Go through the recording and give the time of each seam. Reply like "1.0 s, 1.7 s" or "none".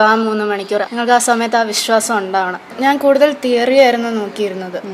0.9 s, 2.7 s